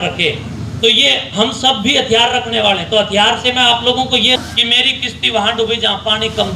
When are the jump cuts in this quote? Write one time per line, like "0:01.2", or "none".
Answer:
0:04.4